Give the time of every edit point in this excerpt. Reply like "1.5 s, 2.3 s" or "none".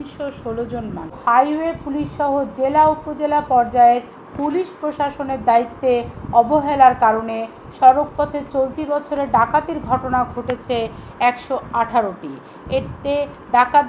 1.2 s